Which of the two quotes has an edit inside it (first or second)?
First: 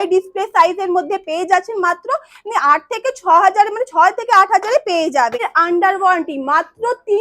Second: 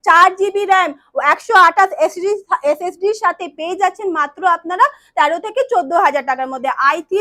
first